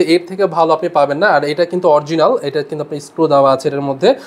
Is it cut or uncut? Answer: uncut